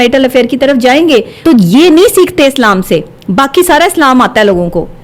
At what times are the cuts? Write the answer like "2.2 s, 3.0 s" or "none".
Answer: 1.3 s